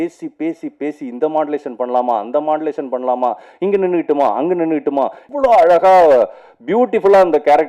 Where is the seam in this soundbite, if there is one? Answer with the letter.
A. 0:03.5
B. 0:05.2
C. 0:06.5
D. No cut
B